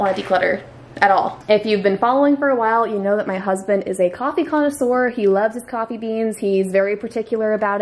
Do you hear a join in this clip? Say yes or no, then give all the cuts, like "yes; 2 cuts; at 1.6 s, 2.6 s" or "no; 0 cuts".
no; 0 cuts